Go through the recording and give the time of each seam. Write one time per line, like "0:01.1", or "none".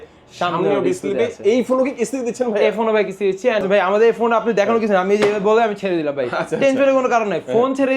0:03.6